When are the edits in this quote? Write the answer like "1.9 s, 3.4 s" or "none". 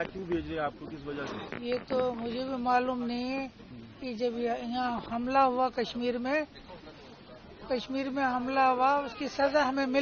none

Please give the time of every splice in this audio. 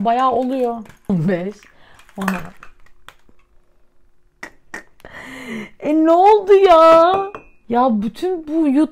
1.1 s

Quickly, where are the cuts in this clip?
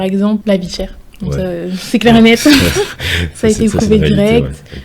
none

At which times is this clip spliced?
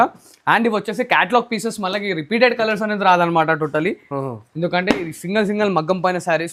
none

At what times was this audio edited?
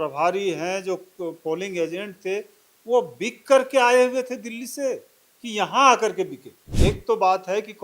6.7 s

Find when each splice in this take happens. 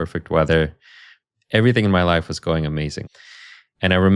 3.0 s

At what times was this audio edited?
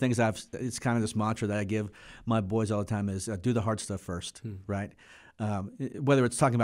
none

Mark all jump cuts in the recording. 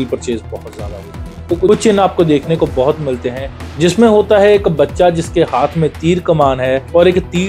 1.4 s

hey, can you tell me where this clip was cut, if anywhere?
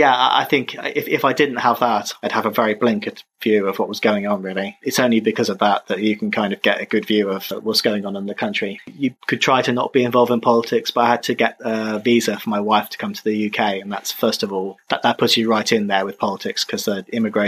4.8 s, 8.9 s

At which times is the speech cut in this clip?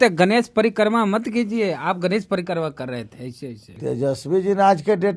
3.7 s

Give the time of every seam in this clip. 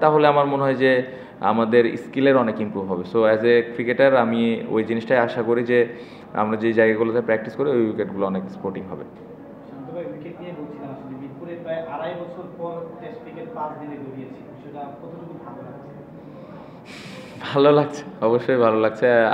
none

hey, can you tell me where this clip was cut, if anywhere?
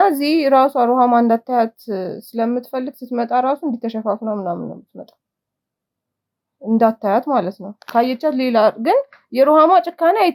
none

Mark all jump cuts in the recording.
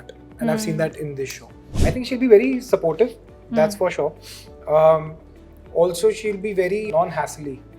1.5 s, 6.9 s

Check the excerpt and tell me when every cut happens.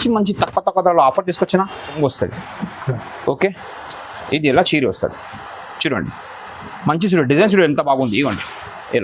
2.0 s

